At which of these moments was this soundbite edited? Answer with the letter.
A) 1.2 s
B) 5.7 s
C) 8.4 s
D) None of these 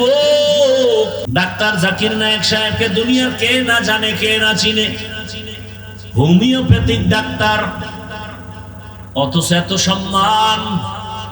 A